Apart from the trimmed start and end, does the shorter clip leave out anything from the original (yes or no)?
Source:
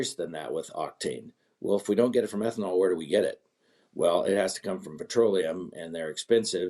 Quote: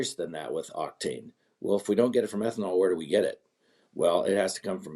no